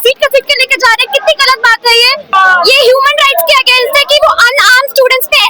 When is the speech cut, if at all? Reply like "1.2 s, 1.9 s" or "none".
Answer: 2.3 s